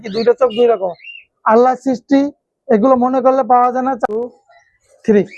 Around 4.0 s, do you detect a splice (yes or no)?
yes